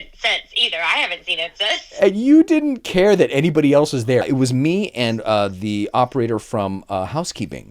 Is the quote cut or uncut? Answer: cut